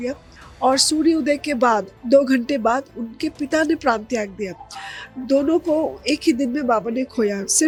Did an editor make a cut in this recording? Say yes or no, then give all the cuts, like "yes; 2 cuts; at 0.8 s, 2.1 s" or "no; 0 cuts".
no; 0 cuts